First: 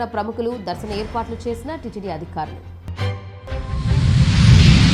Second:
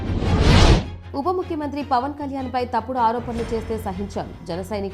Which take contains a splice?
second; 1 cut; at 1.0 s

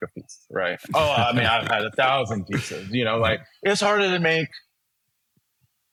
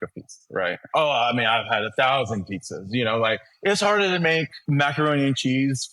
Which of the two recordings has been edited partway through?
second; 1 cut; at 4.5 s

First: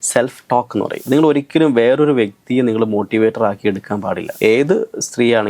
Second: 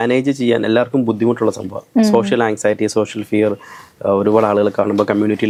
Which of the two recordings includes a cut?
first; 2 cuts; at 1.0 s, 4.3 s

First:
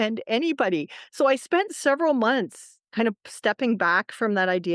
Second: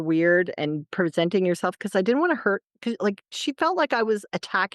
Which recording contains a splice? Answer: second; 2 cuts; at 0.8 s, 3.3 s

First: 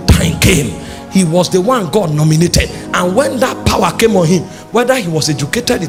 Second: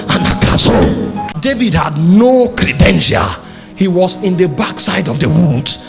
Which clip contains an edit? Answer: second; 1 cut; at 1.3 s

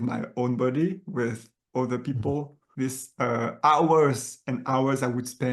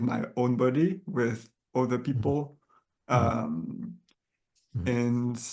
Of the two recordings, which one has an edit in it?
first; 1 cut; at 2.6 s

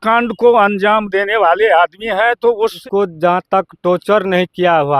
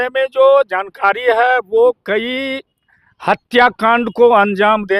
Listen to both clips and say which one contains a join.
first; 1 cut; at 2.8 s

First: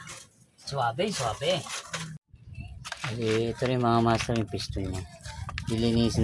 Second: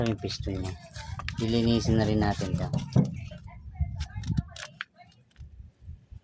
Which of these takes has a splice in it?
first; 1 cut; at 2.3 s

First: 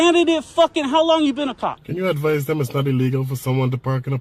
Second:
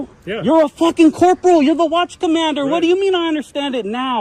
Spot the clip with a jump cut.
first; 1 cut; at 1.8 s

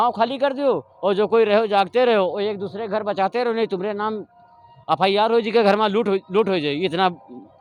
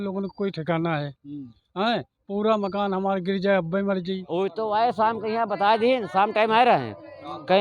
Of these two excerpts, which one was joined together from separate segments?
second; 1 cut; at 4.3 s

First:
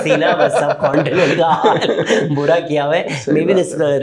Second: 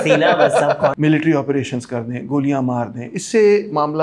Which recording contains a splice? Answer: second; 1 cut; at 0.9 s

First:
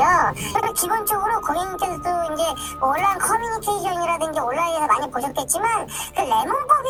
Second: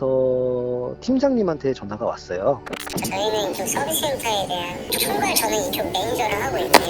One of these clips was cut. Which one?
second; 1 cut; at 2.9 s

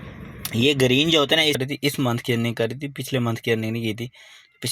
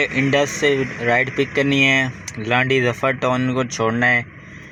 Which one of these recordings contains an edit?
first; 1 cut; at 1.6 s

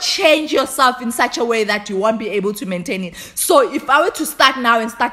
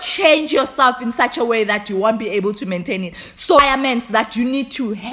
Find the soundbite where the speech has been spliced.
second; 1 cut; at 3.6 s

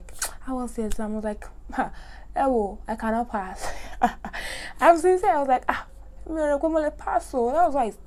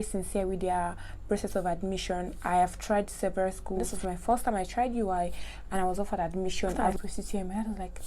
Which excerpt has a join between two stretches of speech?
second; 2 cuts; at 3.9 s, 6.9 s

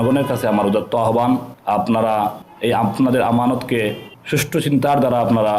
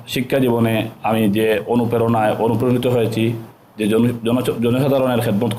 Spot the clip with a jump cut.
first; 3 cuts; at 1.5 s, 2.5 s, 4.1 s

